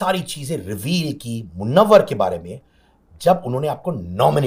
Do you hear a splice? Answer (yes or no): no